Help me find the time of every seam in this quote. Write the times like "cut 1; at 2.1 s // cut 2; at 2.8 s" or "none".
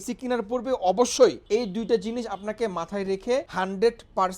cut 1; at 1.4 s // cut 2; at 3.5 s